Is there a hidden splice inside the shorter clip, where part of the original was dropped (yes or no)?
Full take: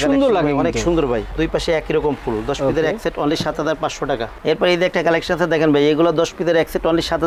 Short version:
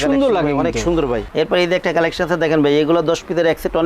yes